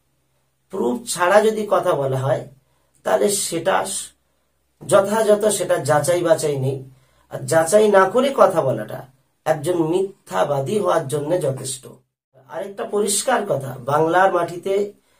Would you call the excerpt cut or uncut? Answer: cut